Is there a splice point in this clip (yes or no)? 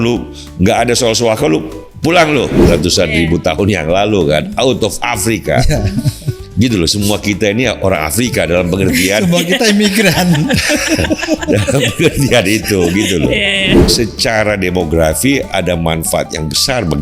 yes